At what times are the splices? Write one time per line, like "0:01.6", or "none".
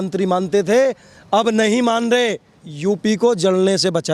0:02.5